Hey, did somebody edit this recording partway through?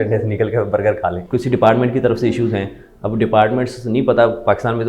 yes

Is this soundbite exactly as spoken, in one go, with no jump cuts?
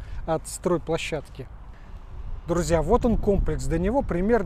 yes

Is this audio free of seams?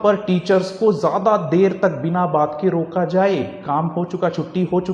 yes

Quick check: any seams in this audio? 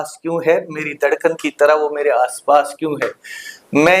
no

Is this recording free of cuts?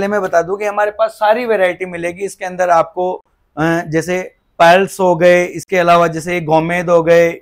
yes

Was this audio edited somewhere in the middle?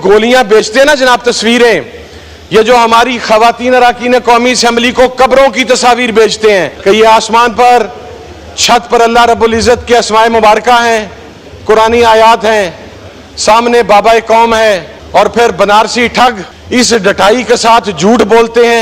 yes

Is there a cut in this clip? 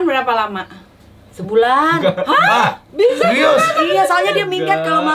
no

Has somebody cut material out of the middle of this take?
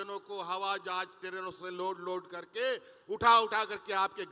no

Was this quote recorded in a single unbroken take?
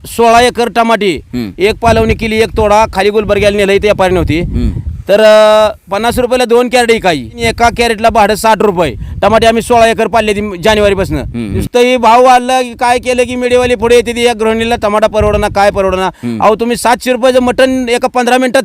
no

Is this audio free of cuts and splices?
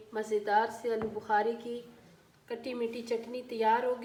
yes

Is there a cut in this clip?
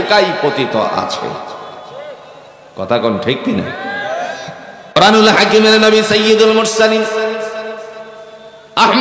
yes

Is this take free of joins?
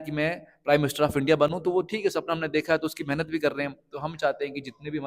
yes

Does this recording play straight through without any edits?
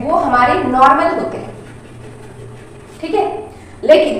yes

